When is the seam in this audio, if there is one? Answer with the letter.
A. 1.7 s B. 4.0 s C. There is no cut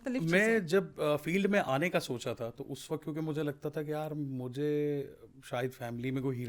A